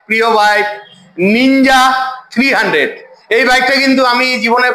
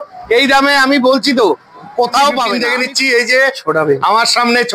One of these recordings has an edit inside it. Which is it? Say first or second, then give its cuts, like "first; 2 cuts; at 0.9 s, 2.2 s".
second; 1 cut; at 2.6 s